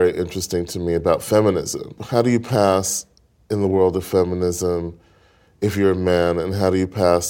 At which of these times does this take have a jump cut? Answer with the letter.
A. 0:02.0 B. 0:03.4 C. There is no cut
A